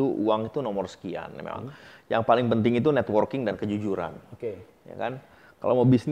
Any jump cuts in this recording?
no; 0 cuts

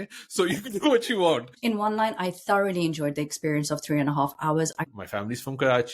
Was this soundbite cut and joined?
yes; 2 cuts; at 1.5 s, 4.8 s

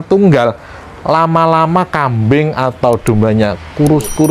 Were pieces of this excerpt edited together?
no; 0 cuts

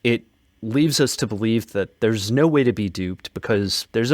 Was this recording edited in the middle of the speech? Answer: yes; 1 cut; at 1.7 s

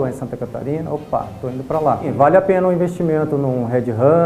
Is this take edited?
yes; 1 cut; at 2.1 s

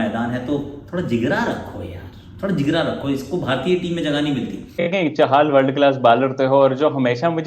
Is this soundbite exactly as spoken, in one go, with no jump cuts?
no; 1 cut; at 4.9 s

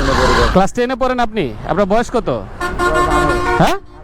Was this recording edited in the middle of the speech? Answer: no; 0 cuts

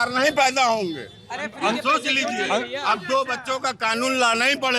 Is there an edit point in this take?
no; 0 cuts

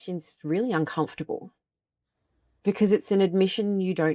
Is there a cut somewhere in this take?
no; 0 cuts

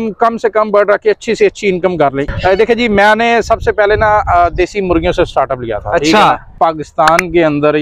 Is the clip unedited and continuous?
no; 2 cuts; at 2.3 s, 6.5 s

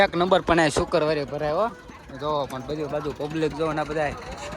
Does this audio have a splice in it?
no; 0 cuts

